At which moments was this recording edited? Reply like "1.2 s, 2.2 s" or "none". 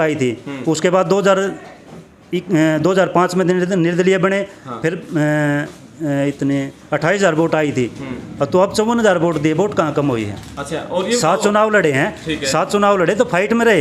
none